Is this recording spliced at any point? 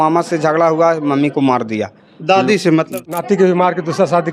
yes; 1 cut; at 2.9 s

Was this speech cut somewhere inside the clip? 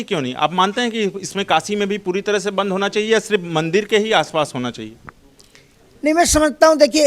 no; 0 cuts

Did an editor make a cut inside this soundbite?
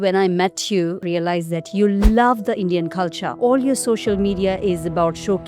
yes; 2 cuts; at 1.0 s, 3.2 s

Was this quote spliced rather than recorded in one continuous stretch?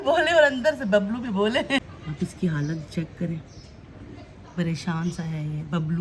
yes; 1 cut; at 2.0 s

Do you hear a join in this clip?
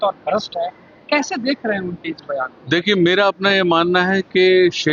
no; 0 cuts

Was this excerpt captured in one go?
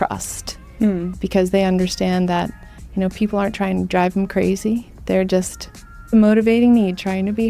no; 1 cut; at 6.1 s

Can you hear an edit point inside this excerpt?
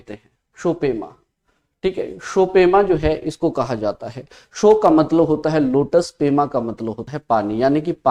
no; 0 cuts

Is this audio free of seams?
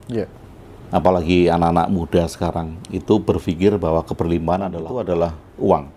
no; 1 cut; at 4.8 s

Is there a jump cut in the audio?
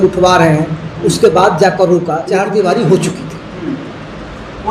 yes; 1 cut; at 2.3 s

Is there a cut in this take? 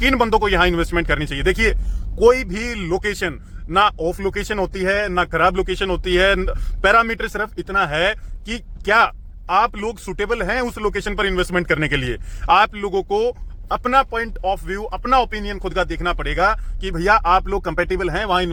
no; 0 cuts

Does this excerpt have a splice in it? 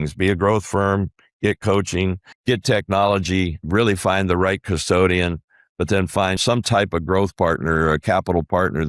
yes; 3 cuts; at 2.3 s, 3.6 s, 6.4 s

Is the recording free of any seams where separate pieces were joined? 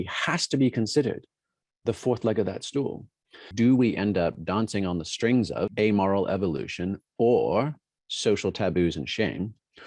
no; 2 cuts; at 3.5 s, 5.7 s

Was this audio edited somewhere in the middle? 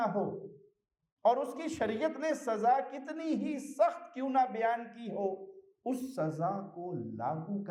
no; 0 cuts

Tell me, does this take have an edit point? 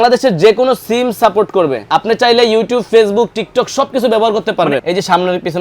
yes; 2 cuts; at 1.9 s, 4.8 s

